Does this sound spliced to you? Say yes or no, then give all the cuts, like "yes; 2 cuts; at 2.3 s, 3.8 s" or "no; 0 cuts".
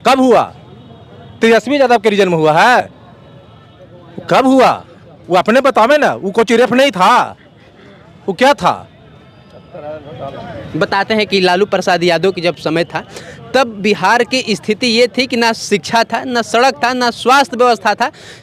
no; 0 cuts